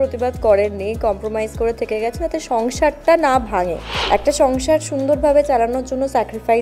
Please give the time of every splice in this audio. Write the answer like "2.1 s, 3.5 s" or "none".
3.9 s